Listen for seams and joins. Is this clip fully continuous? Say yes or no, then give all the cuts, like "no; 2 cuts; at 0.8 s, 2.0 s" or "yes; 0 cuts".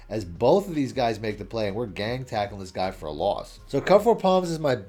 yes; 0 cuts